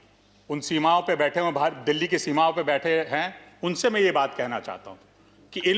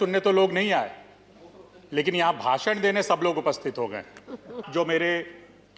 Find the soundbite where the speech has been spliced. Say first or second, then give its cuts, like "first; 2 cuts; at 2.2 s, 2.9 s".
second; 1 cut; at 4.6 s